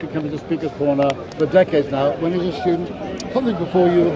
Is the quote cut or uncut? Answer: cut